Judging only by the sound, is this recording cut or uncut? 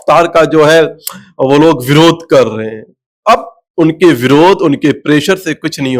uncut